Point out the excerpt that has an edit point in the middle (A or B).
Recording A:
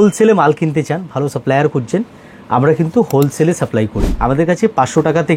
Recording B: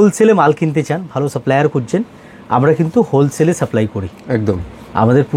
A